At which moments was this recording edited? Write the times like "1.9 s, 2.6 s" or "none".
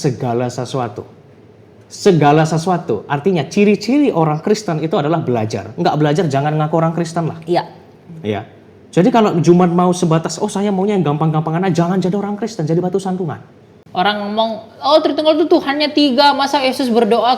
13.8 s